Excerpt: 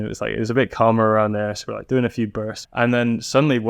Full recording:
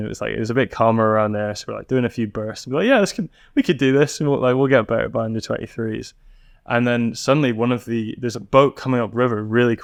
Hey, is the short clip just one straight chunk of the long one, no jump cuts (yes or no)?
no